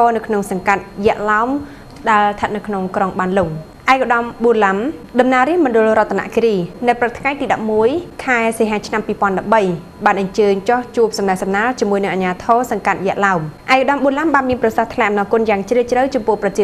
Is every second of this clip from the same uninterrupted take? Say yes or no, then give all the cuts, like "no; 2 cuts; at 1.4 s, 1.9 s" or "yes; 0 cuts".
no; 5 cuts; at 3.7 s, 5.0 s, 6.7 s, 8.1 s, 13.5 s